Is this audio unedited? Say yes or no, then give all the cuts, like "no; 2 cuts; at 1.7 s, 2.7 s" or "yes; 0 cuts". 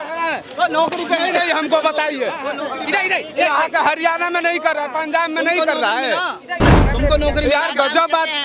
yes; 0 cuts